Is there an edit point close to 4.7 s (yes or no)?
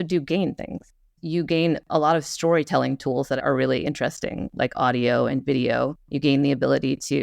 no